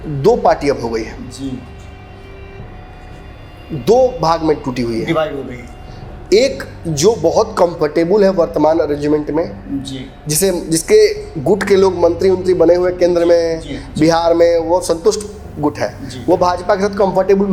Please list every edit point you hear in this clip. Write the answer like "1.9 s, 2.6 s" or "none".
none